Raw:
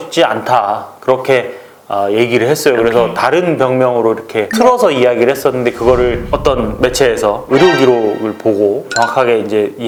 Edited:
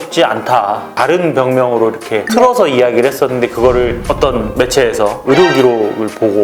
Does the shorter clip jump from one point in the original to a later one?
yes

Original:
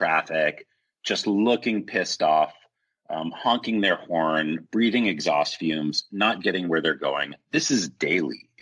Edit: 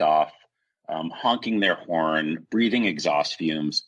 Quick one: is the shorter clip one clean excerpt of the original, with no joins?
yes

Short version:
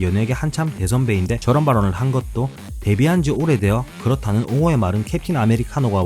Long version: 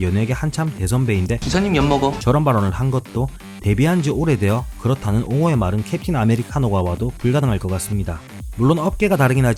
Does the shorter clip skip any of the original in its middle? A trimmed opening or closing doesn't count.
yes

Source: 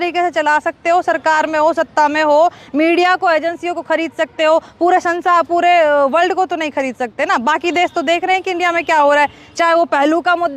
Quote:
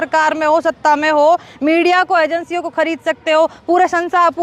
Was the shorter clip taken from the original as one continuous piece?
yes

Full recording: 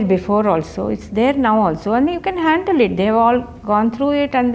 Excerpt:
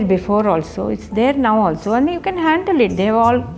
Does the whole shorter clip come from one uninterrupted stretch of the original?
yes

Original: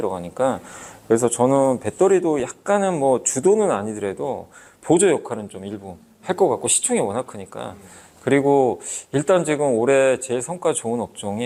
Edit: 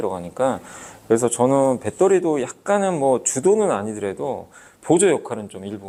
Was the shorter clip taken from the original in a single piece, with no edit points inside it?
yes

